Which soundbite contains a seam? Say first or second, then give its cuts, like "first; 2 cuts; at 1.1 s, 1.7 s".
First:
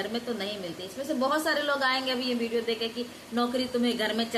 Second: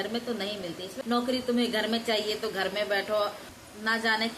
second; 2 cuts; at 0.9 s, 3.4 s